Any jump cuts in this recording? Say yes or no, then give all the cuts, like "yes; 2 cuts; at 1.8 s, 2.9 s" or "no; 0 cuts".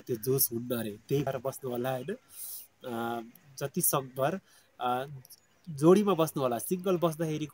yes; 1 cut; at 1.3 s